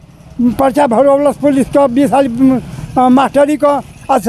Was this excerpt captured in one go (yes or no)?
yes